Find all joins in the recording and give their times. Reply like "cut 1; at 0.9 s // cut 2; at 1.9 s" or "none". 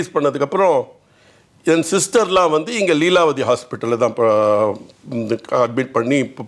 none